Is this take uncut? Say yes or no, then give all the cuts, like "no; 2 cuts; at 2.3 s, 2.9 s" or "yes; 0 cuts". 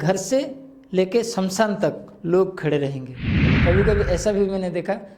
no; 1 cut; at 3.4 s